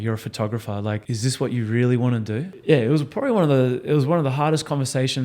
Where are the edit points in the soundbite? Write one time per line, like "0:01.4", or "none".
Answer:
0:01.0
0:02.5